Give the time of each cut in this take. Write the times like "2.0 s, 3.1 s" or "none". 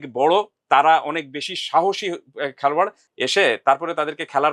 3.0 s